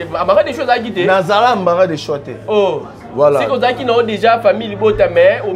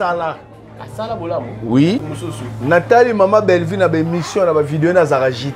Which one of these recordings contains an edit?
second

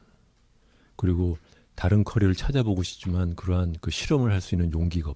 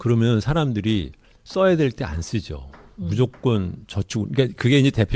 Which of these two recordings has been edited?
second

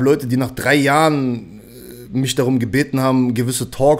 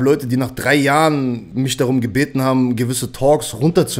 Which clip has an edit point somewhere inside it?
second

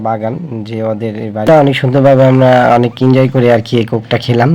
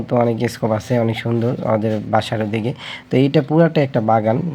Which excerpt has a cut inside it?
first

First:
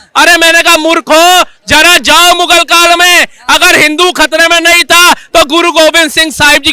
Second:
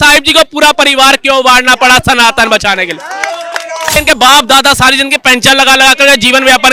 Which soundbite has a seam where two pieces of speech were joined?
second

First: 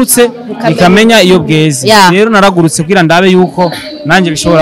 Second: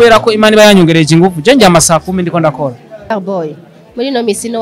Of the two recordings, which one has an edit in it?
second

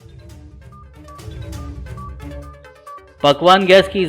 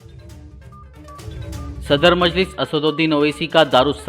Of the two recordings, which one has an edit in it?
second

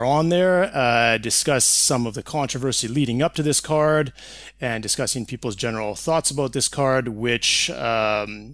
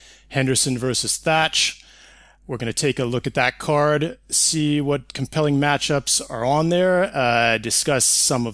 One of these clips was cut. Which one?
second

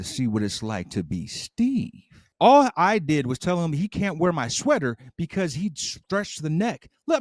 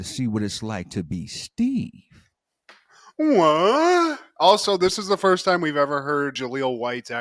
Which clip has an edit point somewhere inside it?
first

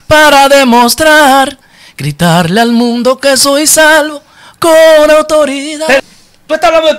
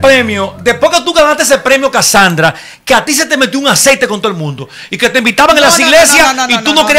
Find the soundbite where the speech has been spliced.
first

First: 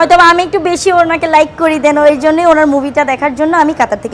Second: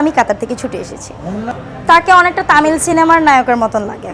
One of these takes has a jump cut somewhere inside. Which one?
second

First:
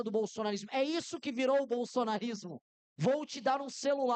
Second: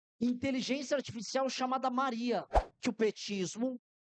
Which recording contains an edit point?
second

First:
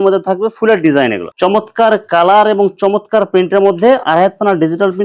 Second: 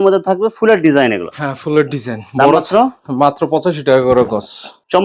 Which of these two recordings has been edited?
first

